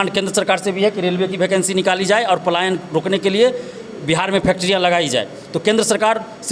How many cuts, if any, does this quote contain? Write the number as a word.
zero